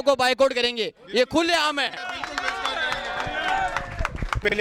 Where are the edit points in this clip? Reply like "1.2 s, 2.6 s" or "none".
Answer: none

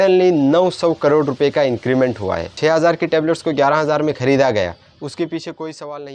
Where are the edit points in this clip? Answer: 2.6 s

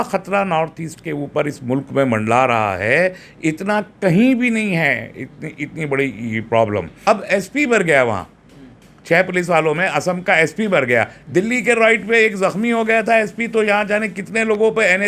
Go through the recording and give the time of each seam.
6.9 s

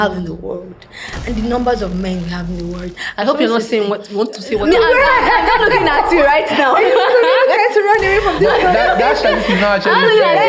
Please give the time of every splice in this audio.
none

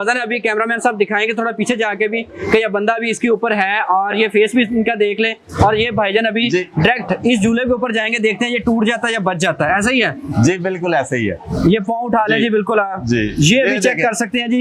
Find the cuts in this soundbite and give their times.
none

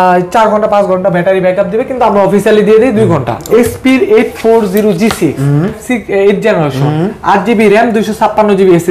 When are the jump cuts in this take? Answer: 3.5 s, 5.8 s

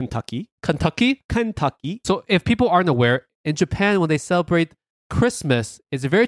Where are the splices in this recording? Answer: 2.0 s, 3.3 s

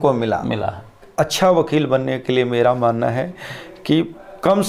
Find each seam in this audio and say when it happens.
1.1 s

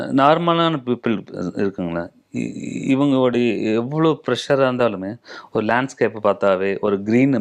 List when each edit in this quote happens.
none

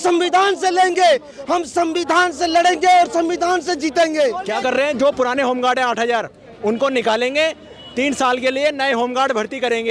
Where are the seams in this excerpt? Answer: 4.4 s

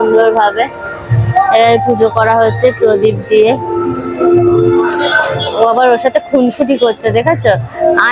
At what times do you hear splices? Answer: none

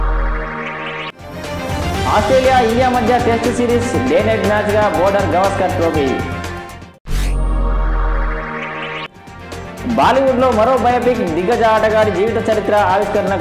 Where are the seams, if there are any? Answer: none

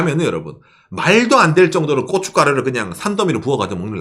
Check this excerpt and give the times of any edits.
none

